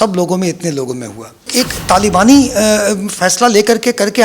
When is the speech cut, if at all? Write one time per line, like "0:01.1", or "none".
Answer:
0:01.5